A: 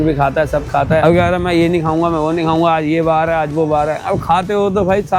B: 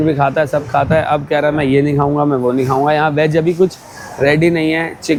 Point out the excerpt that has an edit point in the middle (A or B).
A